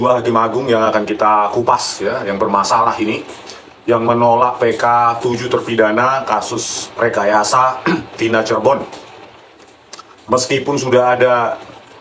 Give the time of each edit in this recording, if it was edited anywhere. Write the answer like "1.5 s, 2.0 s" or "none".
none

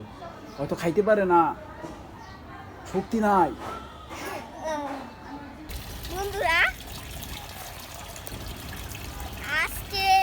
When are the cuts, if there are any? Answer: 5.6 s

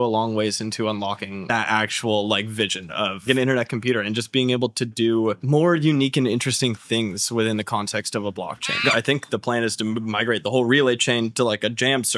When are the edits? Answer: 1.5 s, 3.2 s, 8.8 s

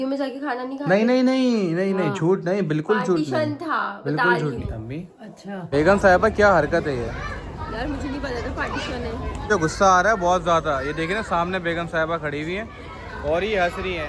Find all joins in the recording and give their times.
5.7 s, 9.5 s

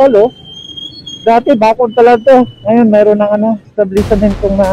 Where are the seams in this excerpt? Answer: 3.7 s

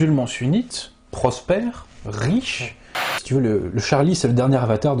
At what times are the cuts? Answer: 3.2 s

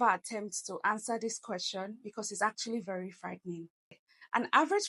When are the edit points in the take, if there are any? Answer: 4.0 s

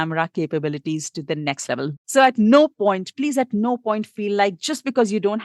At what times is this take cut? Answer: 1.9 s

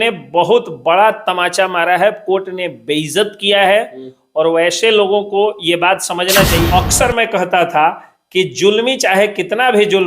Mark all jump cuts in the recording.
6.7 s

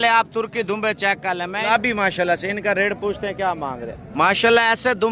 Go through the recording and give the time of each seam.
1.7 s, 4.0 s

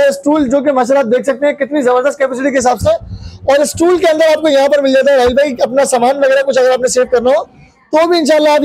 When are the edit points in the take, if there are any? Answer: none

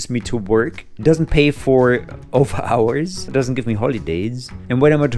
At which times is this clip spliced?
3.3 s

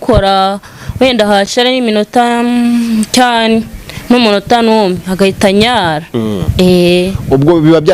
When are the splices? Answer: none

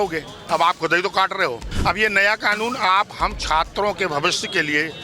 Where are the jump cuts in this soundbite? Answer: 1.7 s

